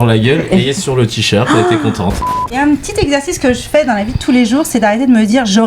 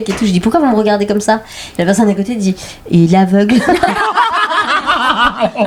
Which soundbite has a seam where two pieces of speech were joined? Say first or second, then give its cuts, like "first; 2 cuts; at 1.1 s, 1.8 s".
first; 1 cut; at 2.5 s